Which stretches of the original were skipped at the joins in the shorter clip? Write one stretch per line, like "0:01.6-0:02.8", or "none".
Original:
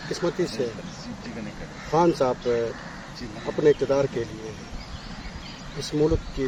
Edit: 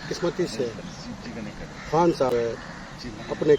0:02.3-0:02.5